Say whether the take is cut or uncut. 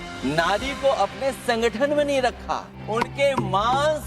cut